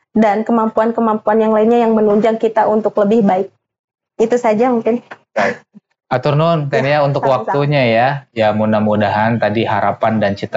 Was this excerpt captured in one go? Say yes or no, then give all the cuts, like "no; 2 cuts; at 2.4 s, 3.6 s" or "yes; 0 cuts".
yes; 0 cuts